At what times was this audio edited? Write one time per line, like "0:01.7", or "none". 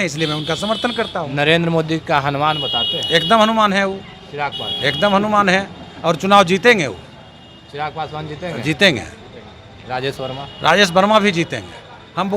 none